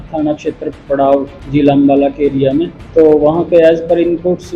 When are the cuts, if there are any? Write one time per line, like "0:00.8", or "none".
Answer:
0:01.4
0:02.8